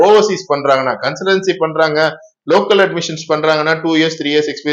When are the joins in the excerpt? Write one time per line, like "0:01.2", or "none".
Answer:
none